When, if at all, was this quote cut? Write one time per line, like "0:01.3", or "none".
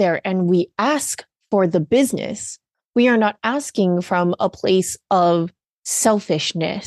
none